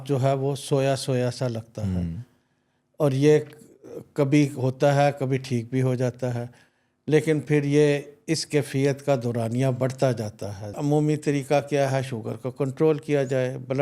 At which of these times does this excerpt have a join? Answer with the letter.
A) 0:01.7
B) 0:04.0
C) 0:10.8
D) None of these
C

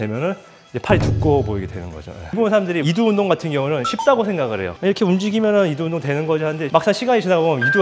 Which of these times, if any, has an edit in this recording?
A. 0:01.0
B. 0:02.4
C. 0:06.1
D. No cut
B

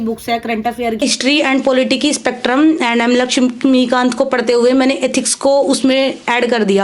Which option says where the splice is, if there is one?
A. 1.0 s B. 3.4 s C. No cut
A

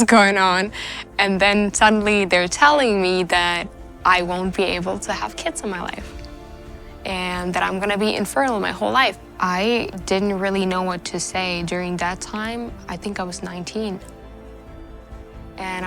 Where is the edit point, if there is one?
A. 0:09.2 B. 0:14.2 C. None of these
A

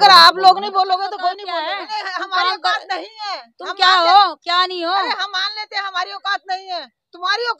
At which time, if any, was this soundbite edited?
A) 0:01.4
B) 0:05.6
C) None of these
A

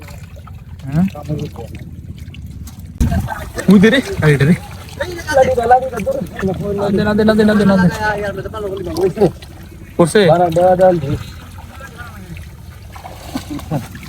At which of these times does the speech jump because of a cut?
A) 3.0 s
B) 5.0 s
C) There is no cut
A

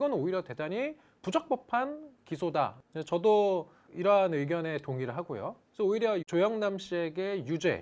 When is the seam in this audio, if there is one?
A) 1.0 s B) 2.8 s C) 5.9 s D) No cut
B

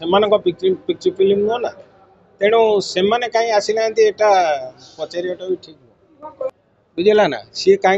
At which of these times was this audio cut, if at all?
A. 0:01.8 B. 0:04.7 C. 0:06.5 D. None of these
C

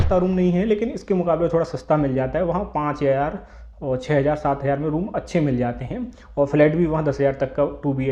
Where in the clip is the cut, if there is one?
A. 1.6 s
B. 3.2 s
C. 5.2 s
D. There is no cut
D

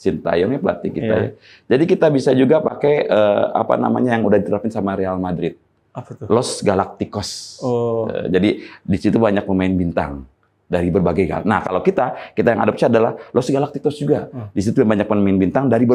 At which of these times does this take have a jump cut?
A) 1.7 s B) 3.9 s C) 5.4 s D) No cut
D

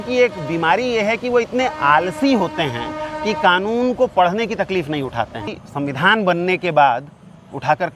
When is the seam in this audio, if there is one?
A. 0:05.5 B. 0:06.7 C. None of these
A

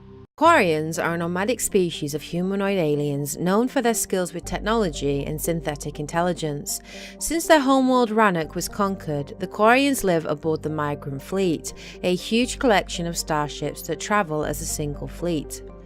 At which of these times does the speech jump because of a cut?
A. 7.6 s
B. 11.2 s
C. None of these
B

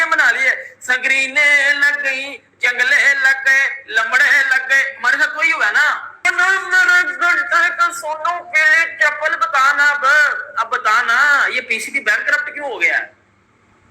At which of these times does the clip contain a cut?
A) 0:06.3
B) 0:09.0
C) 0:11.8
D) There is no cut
A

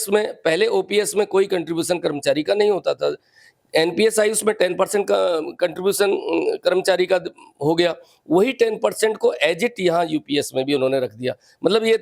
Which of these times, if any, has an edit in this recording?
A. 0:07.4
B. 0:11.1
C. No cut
C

